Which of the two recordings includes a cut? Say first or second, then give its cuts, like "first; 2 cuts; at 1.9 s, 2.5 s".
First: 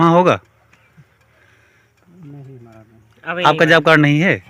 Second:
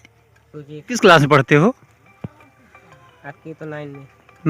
second; 1 cut; at 0.9 s